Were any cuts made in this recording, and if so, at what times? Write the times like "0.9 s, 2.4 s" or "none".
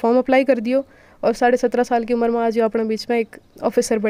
none